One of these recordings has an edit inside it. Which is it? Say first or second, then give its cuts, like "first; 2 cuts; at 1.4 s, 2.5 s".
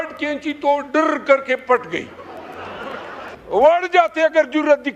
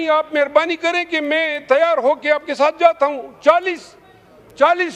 first; 1 cut; at 3.3 s